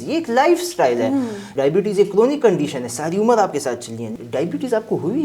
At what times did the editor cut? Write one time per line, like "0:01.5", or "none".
0:01.4
0:04.1